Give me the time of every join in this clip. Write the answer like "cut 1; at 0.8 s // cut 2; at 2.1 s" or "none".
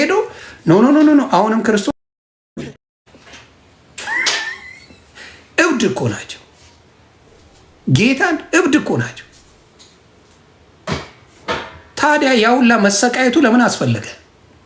none